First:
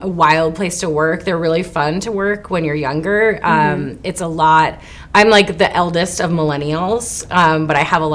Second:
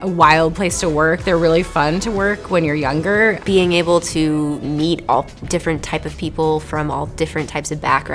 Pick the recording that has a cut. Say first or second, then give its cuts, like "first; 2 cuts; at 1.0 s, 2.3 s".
second; 1 cut; at 3.4 s